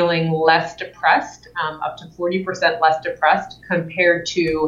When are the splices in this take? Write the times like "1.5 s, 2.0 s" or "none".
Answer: none